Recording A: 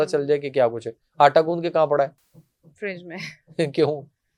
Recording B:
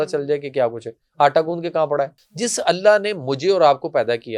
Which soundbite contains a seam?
B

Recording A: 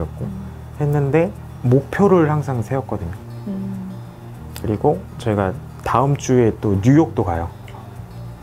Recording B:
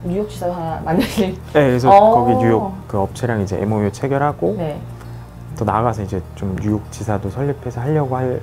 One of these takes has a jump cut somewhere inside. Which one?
A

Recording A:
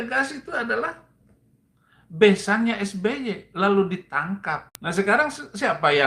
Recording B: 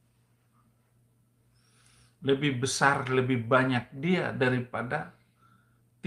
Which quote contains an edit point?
A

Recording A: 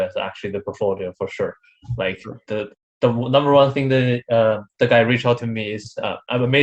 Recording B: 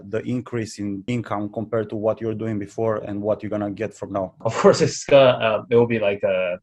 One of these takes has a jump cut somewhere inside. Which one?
B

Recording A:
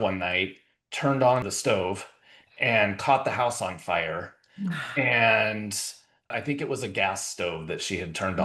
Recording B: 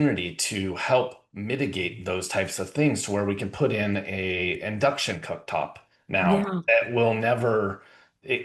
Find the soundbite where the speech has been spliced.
A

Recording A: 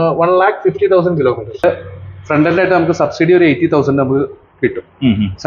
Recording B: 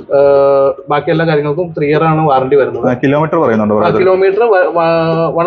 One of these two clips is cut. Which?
A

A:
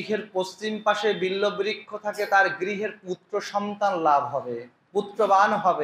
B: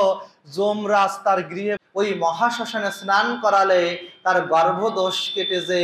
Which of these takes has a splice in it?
B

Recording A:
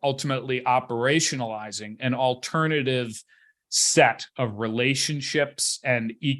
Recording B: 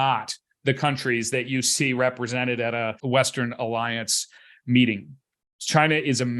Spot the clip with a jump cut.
B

